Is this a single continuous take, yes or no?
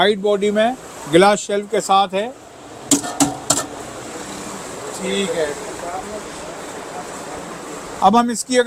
yes